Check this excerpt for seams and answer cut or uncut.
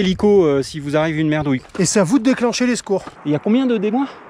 cut